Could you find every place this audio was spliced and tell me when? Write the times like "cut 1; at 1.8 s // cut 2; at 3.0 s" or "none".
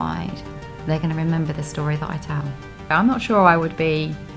cut 1; at 2.9 s